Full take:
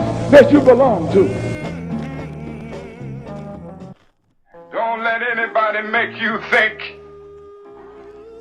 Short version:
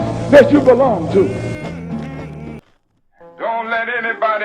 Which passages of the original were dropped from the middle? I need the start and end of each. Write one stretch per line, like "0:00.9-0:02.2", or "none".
0:02.6-0:03.9